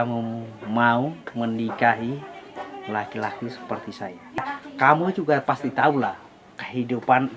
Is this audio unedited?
no; 1 cut; at 4.6 s

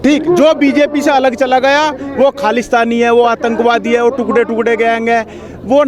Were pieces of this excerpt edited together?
no; 0 cuts

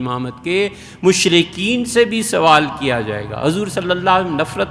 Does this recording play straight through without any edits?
yes; 0 cuts

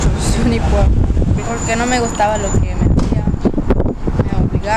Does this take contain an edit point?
yes; 1 cut; at 1.4 s

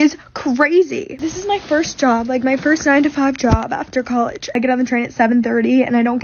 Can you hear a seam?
yes; 2 cuts; at 1.2 s, 4.6 s

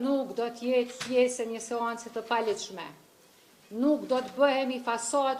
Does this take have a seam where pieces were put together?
no; 0 cuts

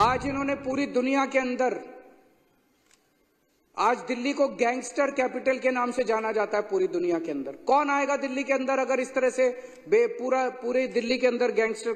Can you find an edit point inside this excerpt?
no; 0 cuts

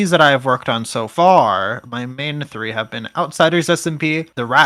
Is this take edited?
no; 0 cuts

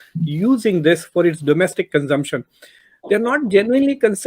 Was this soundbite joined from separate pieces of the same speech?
no; 0 cuts

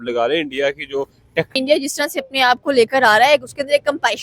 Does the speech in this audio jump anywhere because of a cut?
yes; 1 cut; at 1.6 s

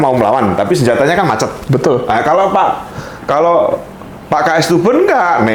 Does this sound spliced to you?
no; 0 cuts

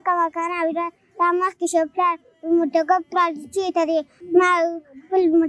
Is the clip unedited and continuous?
no; 1 cut; at 4.2 s

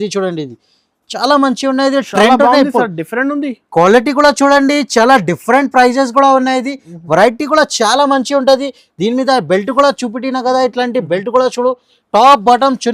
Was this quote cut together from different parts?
no; 0 cuts

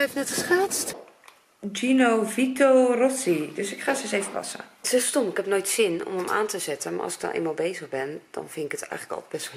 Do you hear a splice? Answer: yes; 2 cuts; at 0.9 s, 4.9 s

